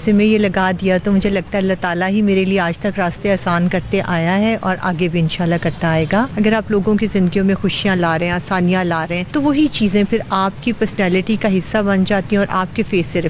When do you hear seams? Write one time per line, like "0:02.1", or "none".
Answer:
0:06.3
0:09.2

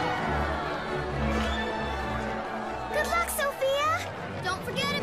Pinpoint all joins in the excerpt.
0:02.3

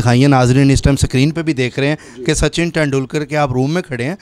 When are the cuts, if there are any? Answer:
none

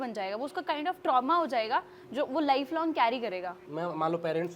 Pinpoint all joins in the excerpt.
0:03.6

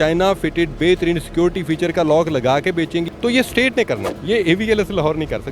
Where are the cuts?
0:03.1
0:04.1

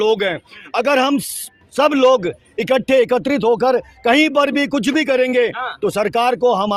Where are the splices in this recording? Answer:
none

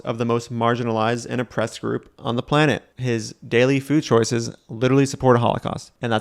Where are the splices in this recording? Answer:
0:02.9

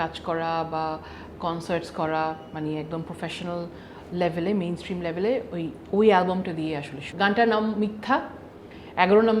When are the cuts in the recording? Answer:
0:07.0

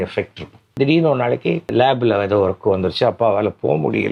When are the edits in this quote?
0:00.7
0:01.7

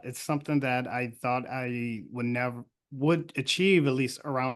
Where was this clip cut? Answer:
none

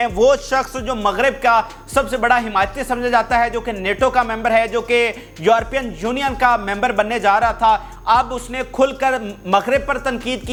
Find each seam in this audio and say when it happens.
none

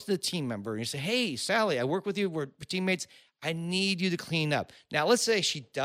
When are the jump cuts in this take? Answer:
none

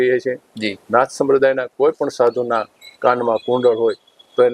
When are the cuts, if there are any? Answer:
none

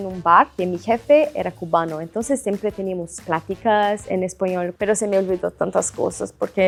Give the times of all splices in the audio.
none

